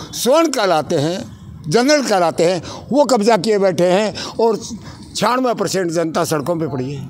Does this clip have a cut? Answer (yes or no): no